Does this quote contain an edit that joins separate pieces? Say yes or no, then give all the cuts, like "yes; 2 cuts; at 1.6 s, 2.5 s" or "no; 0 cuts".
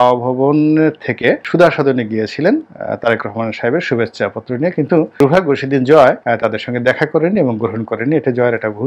no; 0 cuts